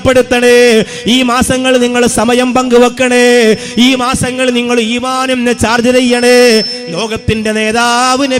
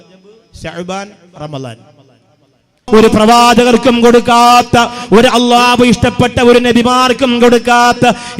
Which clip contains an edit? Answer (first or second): second